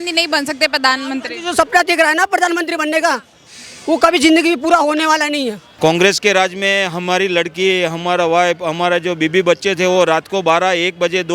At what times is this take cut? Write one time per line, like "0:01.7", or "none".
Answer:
0:05.6